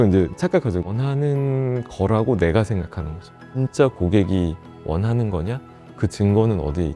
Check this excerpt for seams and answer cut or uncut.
cut